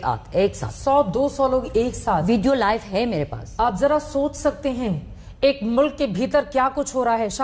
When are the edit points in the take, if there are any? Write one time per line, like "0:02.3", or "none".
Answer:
none